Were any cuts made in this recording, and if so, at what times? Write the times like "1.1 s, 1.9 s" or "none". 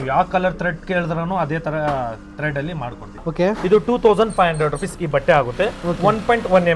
3.3 s